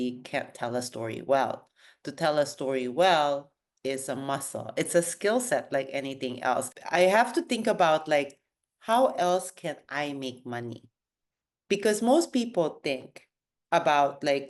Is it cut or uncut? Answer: cut